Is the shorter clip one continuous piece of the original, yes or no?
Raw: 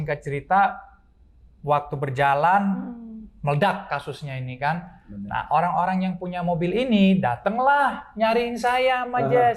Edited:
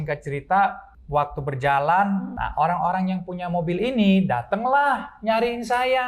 no